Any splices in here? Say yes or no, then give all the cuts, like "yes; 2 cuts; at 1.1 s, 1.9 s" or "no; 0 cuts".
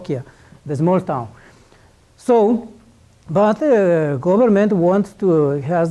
no; 0 cuts